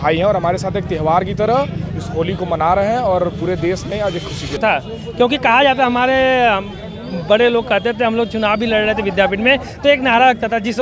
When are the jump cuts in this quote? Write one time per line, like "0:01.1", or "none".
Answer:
0:04.6